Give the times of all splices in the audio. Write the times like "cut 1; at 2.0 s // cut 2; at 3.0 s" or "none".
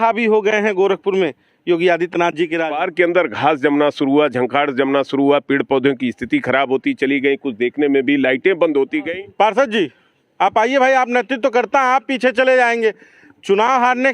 cut 1; at 2.9 s // cut 2; at 9.0 s